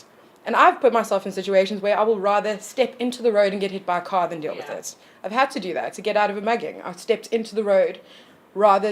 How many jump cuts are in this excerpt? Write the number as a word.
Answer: one